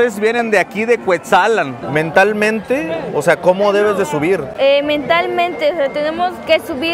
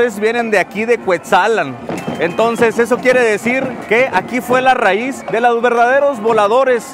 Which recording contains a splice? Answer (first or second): first